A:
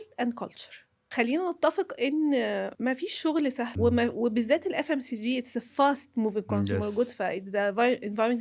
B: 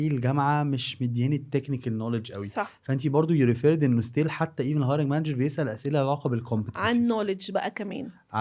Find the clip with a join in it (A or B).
A